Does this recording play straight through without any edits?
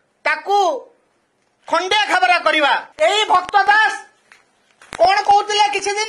no; 1 cut; at 2.9 s

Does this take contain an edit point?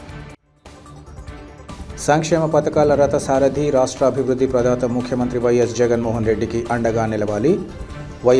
no; 0 cuts

